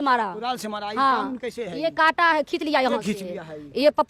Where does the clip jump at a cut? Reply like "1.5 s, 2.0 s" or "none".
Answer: none